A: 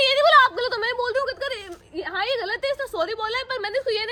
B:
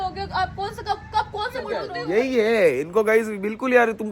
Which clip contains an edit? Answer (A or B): B